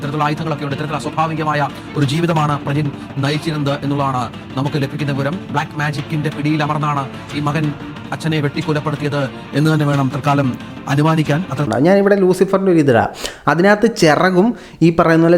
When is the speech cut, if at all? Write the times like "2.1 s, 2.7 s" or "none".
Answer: 11.7 s

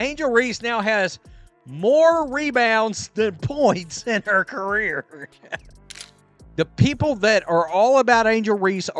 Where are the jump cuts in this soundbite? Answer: 5.8 s

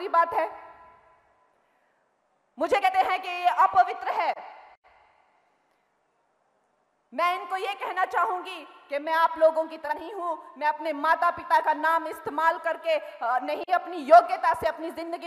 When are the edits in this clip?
none

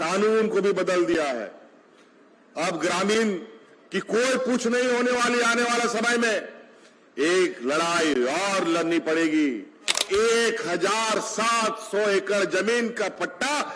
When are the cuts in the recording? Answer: 10.0 s

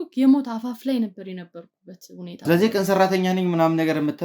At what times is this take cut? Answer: 2.4 s

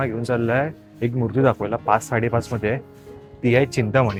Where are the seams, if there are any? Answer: none

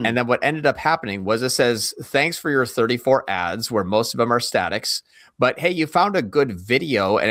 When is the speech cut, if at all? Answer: none

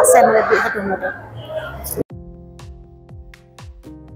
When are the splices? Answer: 2.1 s

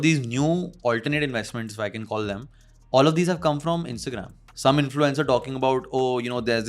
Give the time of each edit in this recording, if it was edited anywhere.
4.5 s

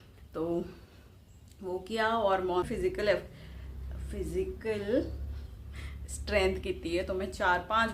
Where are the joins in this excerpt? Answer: 2.7 s

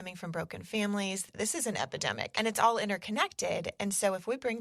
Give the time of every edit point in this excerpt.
1.2 s, 2.3 s

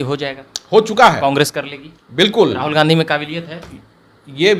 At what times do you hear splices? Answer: none

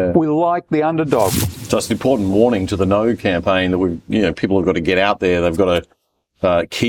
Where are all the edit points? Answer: 1.3 s

